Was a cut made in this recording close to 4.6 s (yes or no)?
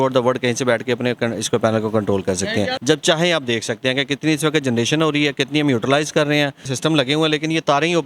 no